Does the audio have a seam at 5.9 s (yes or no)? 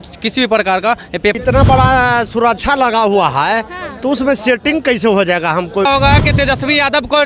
yes